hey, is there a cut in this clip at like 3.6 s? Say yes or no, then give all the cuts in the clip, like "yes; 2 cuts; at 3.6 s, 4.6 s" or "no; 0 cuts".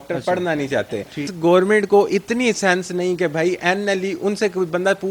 no; 1 cut; at 1.2 s